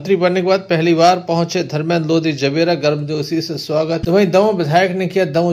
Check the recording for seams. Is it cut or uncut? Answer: uncut